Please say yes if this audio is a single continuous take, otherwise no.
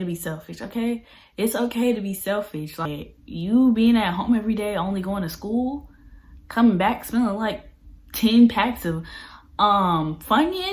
no